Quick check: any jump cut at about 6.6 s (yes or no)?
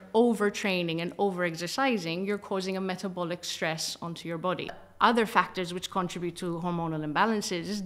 no